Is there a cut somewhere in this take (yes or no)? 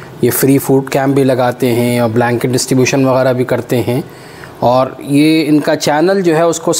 no